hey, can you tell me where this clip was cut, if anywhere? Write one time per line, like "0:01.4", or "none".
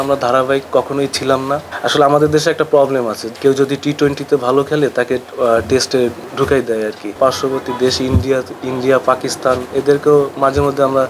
0:01.7
0:03.2
0:06.2
0:07.2